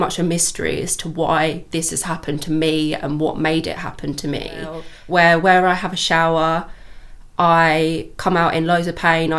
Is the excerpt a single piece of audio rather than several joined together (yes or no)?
no